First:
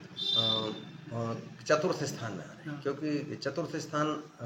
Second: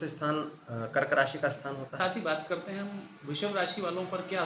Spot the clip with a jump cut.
second; 1 cut; at 2.0 s

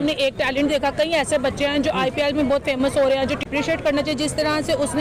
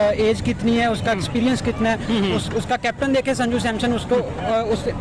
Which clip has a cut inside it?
first; 1 cut; at 3.5 s

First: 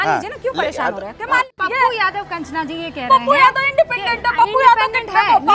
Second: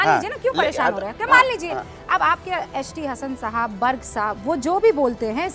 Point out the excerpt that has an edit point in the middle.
first; 1 cut; at 1.5 s

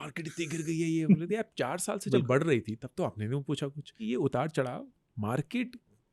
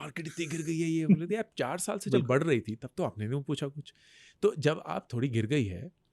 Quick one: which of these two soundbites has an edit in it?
first; 1 cut; at 4.0 s

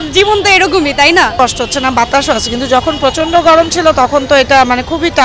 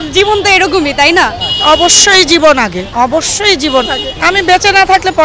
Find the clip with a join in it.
second; 3 cuts; at 1.3 s, 2.8 s, 4.1 s

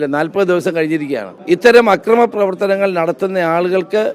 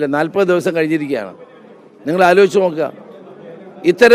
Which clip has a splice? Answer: first; 1 cut; at 1.3 s

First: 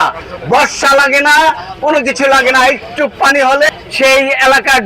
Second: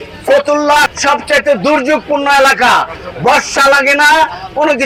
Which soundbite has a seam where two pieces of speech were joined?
first; 1 cut; at 3.7 s

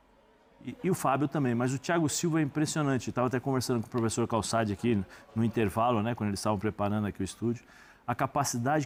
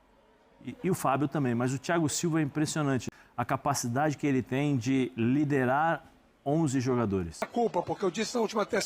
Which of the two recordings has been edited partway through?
second; 2 cuts; at 3.1 s, 7.5 s

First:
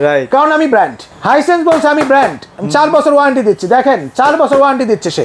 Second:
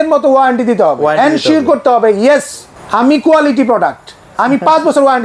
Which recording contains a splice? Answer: first; 1 cut; at 1.1 s

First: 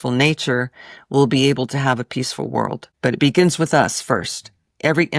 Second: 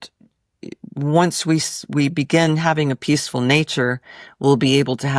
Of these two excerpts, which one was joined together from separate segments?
first; 1 cut; at 2.9 s

